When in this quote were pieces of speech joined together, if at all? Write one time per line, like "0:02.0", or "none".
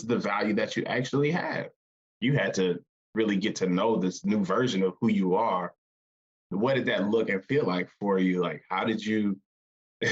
0:02.1